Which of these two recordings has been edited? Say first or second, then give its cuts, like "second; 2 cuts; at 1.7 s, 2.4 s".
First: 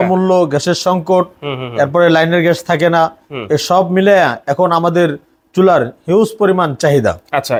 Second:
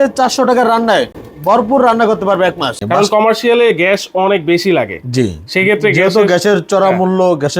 second; 2 cuts; at 1.2 s, 2.8 s